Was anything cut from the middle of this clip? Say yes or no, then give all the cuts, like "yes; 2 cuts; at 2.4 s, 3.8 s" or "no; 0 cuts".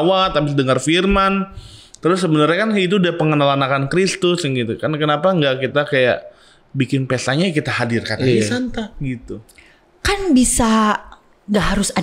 no; 0 cuts